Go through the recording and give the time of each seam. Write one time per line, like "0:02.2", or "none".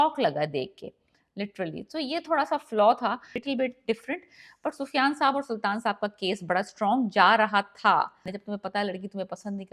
0:03.4
0:08.3